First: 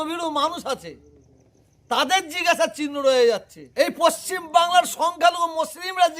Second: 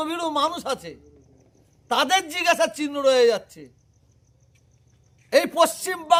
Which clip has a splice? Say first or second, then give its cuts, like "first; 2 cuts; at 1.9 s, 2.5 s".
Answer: first; 1 cut; at 3.6 s